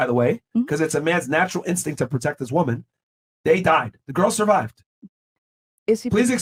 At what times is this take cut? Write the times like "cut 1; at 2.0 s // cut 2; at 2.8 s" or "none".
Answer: none